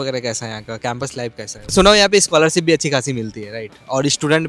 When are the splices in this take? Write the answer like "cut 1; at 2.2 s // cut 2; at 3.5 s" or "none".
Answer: cut 1; at 1.7 s